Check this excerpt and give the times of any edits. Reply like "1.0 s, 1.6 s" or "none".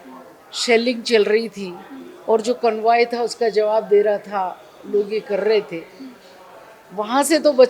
none